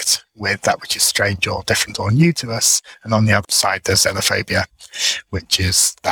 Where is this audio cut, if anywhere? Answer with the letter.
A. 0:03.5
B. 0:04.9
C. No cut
A